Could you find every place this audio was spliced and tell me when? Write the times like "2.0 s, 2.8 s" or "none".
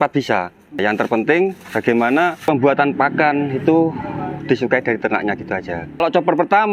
0.8 s, 2.4 s, 6.0 s